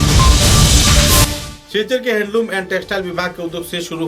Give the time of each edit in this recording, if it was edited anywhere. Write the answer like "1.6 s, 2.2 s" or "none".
1.3 s